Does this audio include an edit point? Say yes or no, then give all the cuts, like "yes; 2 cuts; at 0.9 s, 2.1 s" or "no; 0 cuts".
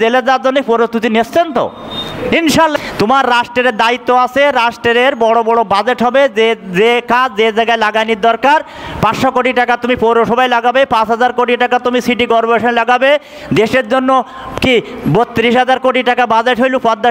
yes; 1 cut; at 2.7 s